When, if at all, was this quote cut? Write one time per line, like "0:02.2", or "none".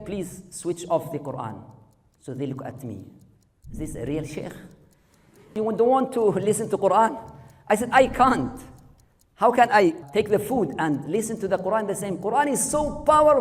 0:05.5
0:10.0
0:11.1

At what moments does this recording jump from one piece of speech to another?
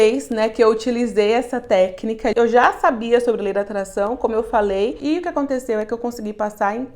0:02.3
0:05.0

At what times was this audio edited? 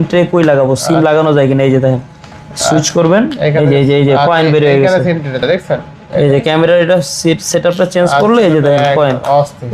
0:05.4

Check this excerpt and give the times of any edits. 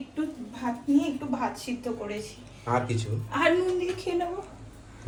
none

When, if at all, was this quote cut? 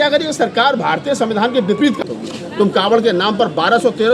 0:02.0

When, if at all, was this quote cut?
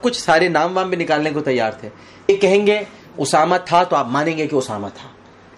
0:02.1

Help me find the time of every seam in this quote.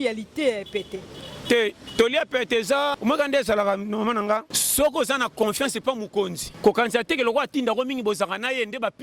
0:03.0
0:04.6
0:06.4

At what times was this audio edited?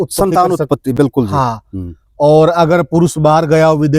none

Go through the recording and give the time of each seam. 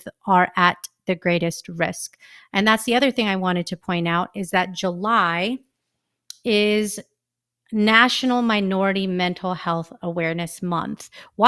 none

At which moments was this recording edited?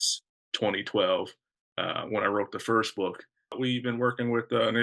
0:03.6

